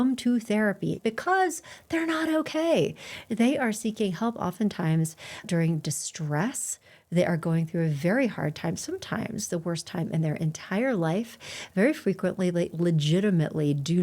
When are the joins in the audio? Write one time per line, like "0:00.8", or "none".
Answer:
0:01.0